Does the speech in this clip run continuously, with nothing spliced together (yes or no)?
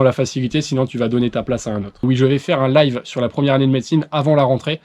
no